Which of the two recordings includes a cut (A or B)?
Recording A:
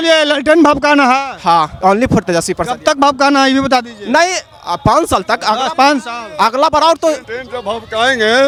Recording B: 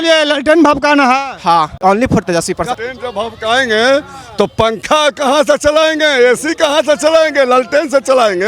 B